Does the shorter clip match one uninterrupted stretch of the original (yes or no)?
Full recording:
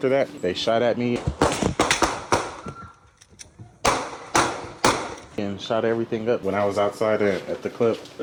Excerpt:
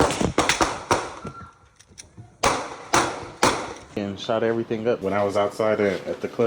yes